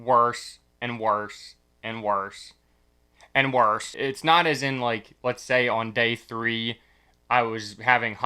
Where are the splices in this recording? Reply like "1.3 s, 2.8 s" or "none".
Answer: 3.9 s